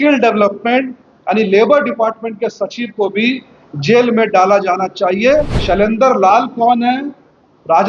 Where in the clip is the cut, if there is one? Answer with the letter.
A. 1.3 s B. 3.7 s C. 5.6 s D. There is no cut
C